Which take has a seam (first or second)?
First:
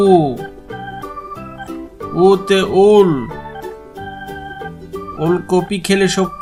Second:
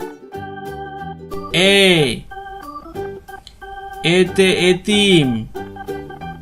second